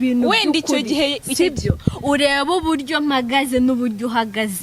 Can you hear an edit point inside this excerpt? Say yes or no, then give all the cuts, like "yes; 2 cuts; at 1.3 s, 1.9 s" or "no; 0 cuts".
no; 0 cuts